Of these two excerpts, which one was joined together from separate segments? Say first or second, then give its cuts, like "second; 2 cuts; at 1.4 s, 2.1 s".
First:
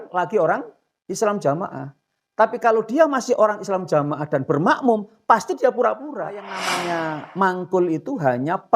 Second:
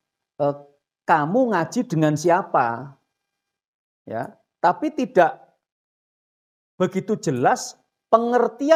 first; 1 cut; at 6.8 s